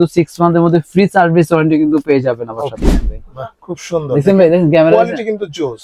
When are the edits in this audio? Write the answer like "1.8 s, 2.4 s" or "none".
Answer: 2.8 s